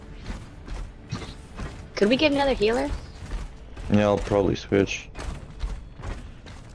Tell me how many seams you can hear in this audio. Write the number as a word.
one